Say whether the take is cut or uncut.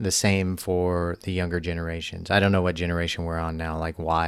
uncut